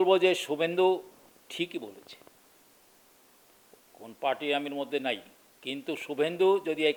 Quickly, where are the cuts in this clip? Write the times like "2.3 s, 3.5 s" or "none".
none